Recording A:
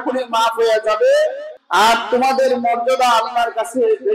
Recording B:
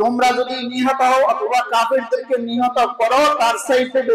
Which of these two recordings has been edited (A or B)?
A